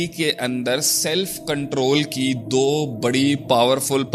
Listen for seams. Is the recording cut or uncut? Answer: uncut